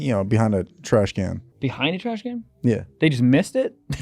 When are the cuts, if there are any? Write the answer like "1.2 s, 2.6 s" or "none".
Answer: 1.5 s